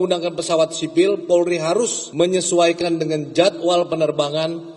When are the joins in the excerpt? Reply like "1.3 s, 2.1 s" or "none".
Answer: 2.0 s

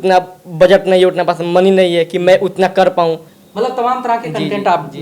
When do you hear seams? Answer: 3.4 s

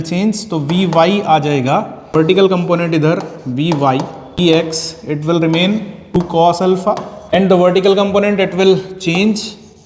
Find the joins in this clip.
2.3 s, 4.4 s, 6.2 s, 7.3 s

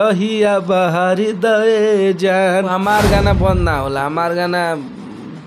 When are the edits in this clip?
2.7 s

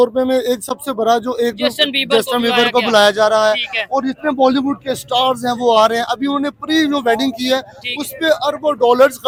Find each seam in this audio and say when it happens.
none

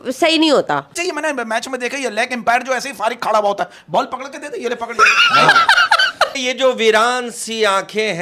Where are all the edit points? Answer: 1.0 s, 6.4 s

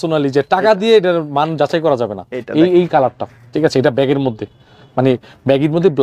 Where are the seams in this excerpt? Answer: none

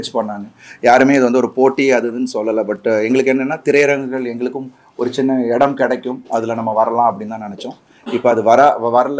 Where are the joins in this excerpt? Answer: none

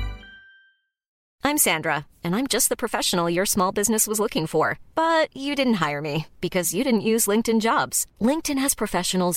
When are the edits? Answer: 1.1 s

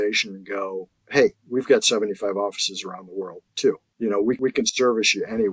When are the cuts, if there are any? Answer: 1.0 s, 4.4 s

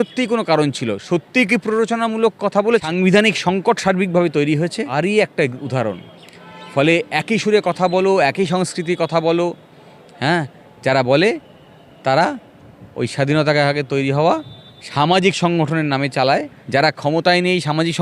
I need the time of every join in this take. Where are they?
2.9 s, 4.9 s, 16.6 s

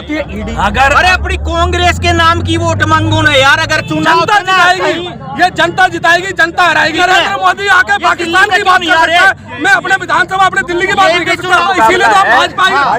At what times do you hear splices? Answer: 3.9 s, 6.9 s, 11.6 s

